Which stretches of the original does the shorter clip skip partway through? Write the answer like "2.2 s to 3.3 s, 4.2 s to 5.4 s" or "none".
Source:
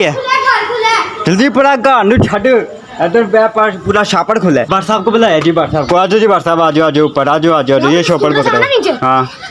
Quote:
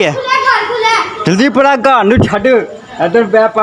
none